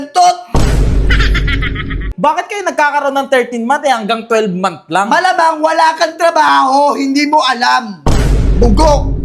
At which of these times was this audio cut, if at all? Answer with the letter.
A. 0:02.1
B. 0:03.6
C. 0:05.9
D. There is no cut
A